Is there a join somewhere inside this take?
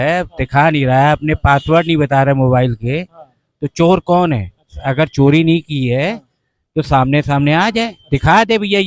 no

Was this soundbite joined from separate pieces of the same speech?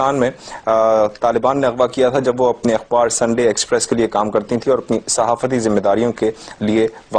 yes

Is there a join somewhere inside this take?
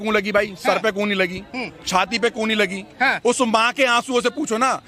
no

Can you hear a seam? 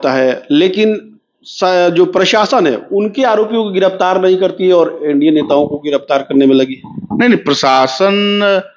no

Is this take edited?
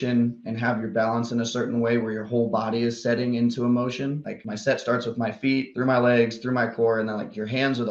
no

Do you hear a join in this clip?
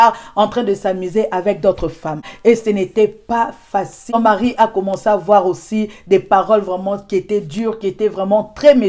no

